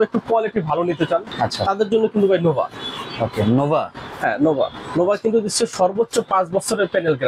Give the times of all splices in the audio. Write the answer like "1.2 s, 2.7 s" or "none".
1.3 s